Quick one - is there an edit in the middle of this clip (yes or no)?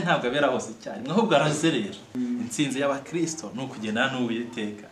yes